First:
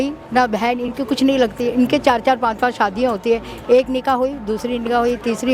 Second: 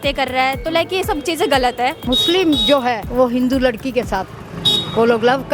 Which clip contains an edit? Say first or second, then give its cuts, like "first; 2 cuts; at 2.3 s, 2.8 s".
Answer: second; 2 cuts; at 2.0 s, 3.0 s